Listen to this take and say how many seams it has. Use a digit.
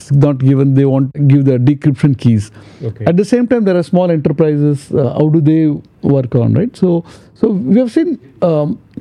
1